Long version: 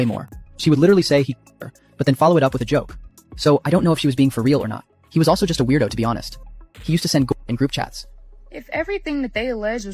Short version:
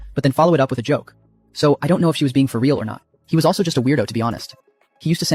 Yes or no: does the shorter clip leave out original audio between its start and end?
no